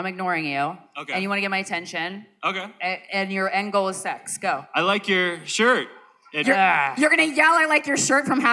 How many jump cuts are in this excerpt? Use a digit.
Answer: 1